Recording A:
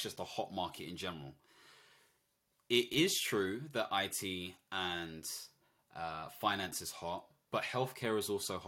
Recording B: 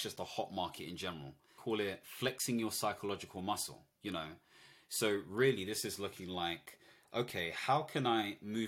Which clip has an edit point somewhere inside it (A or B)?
B